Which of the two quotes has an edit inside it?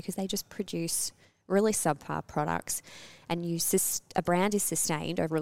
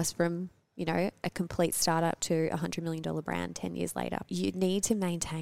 second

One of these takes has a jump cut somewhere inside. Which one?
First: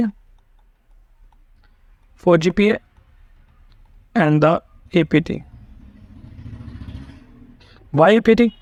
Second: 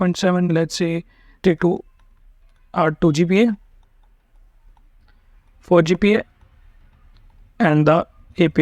second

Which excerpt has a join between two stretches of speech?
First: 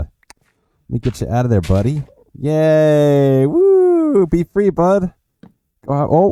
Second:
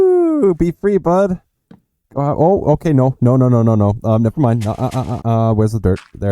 second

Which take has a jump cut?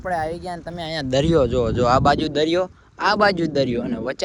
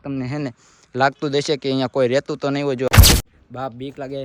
second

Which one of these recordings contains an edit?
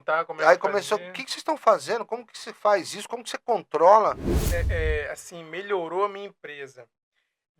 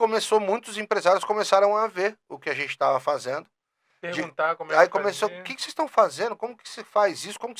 first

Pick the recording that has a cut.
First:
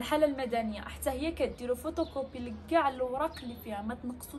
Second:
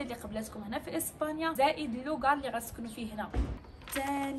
second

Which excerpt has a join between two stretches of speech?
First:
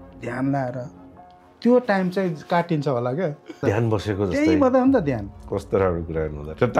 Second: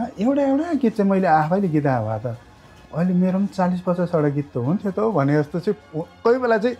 first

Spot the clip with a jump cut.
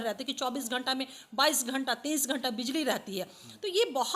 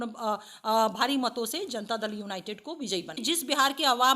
second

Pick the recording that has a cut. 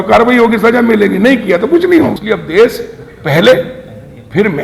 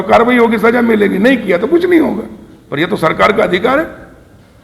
first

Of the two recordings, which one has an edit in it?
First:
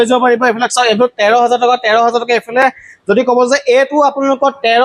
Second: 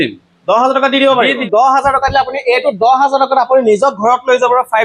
second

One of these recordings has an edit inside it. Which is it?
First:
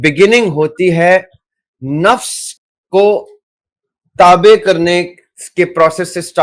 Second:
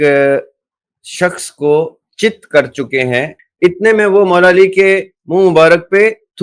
second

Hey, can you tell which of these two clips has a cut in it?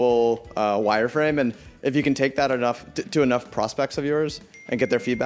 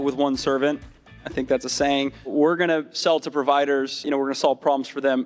second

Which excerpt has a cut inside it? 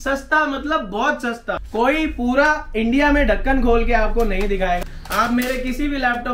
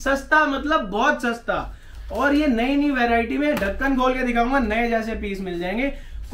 first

